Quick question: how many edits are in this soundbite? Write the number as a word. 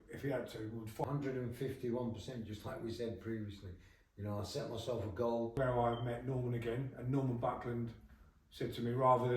two